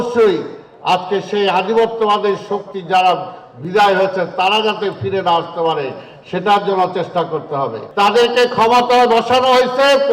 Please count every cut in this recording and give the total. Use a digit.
1